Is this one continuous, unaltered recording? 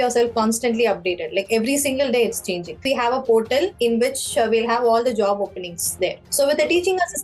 no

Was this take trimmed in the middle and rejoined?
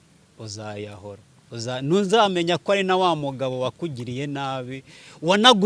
no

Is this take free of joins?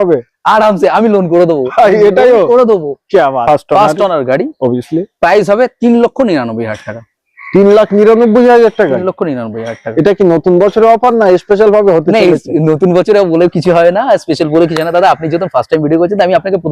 no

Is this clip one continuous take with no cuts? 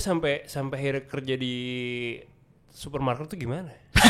yes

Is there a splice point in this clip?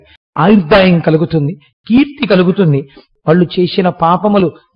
yes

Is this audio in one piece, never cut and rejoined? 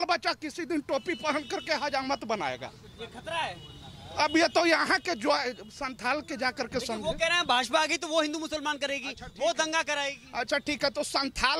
yes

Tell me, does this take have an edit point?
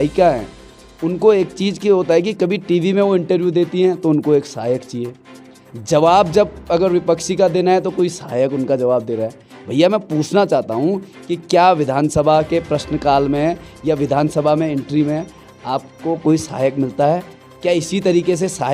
no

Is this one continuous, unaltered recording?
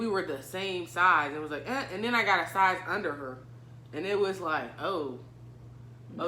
yes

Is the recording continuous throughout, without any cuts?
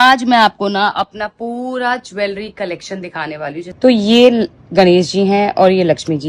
no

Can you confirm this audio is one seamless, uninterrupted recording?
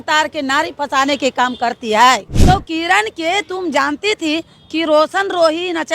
no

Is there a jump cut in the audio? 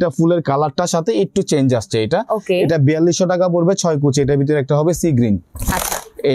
no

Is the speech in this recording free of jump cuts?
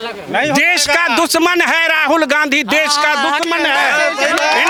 yes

